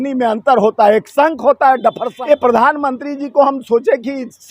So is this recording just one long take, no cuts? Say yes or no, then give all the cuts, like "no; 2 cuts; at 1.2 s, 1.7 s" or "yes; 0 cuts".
no; 1 cut; at 2.1 s